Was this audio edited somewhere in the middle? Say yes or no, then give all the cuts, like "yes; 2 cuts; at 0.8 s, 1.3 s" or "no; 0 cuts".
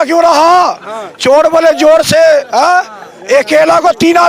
no; 0 cuts